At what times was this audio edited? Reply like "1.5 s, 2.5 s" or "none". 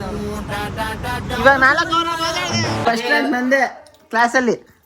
2.8 s